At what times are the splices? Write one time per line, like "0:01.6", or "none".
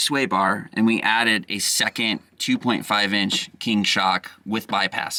none